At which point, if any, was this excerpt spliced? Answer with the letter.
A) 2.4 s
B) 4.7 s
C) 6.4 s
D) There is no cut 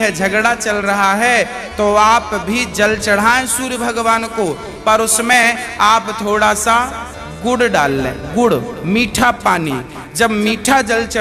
D